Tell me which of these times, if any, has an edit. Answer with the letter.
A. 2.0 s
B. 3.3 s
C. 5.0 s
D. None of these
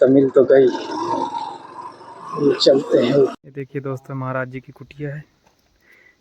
B